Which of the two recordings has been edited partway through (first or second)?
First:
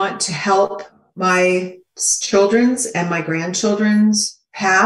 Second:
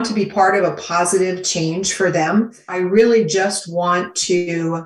second